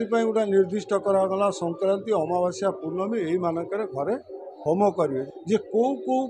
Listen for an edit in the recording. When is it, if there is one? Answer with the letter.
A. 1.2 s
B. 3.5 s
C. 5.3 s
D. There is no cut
C